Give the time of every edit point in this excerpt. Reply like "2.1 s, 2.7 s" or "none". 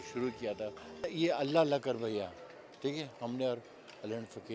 1.0 s